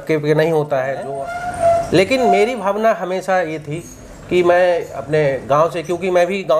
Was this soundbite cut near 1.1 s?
yes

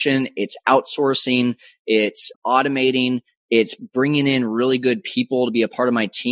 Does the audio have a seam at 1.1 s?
no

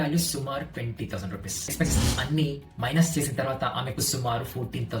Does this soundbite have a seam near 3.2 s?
no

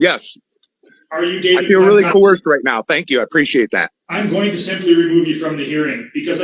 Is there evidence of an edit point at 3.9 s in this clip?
yes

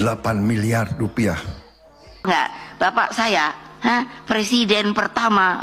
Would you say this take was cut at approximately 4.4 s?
no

